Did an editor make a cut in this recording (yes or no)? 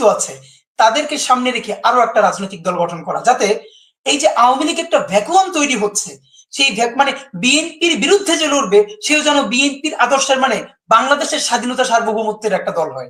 no